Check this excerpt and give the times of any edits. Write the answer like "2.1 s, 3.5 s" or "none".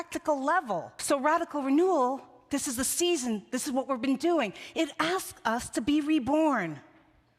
0.9 s